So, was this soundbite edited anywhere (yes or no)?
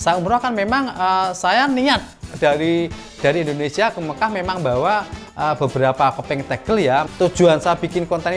yes